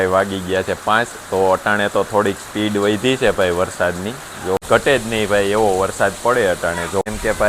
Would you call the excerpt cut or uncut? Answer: cut